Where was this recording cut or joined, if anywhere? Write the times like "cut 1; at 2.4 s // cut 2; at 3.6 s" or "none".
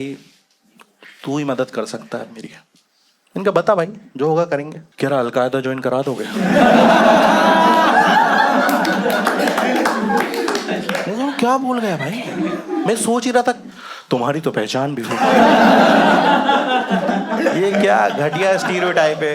cut 1; at 4.8 s